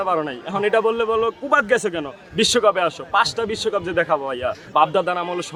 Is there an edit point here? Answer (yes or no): no